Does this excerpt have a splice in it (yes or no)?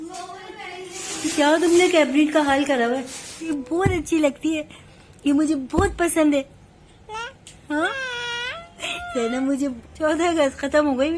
yes